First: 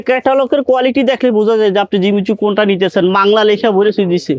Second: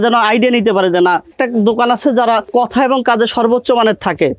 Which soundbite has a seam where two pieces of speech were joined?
second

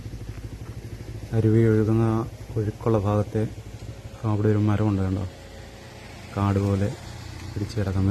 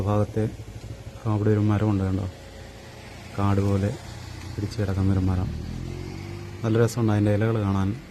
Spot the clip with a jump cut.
first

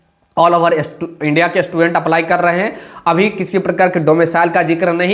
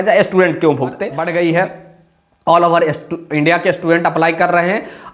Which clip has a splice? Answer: second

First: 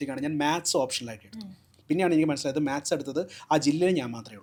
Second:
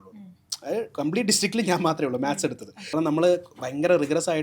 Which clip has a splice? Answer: second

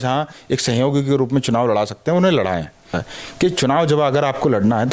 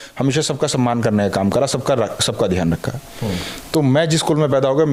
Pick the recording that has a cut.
first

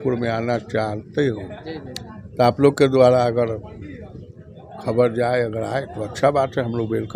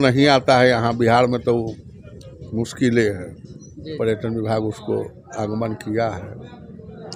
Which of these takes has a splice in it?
second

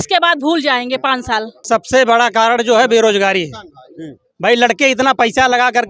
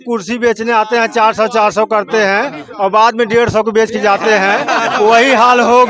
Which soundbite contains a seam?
first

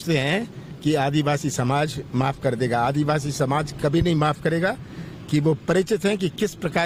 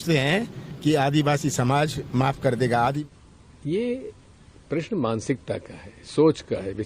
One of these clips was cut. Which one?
second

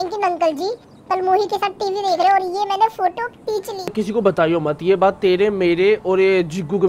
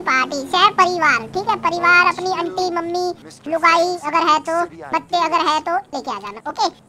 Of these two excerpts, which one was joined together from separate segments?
first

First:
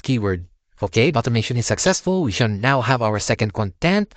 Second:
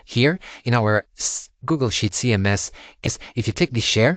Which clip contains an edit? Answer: second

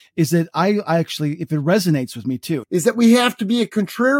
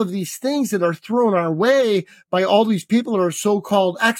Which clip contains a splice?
first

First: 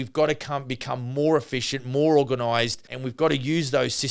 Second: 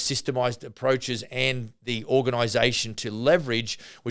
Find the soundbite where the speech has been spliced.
first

